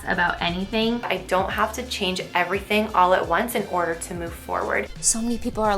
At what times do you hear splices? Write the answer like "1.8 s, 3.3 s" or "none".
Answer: 1.1 s, 4.9 s